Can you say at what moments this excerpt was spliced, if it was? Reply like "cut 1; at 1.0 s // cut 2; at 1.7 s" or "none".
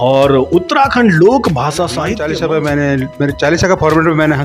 cut 1; at 2.1 s